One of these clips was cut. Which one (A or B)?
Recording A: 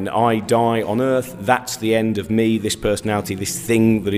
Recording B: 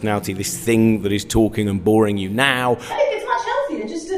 B